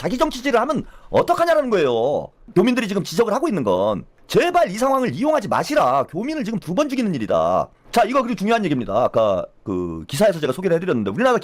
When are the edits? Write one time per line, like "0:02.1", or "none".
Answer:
none